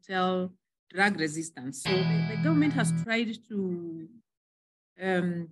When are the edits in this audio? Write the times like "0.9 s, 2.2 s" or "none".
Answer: 2.3 s